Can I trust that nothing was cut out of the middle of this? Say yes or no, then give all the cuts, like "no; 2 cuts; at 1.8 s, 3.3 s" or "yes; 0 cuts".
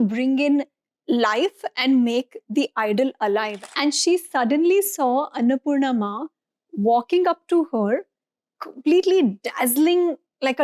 no; 1 cut; at 3.6 s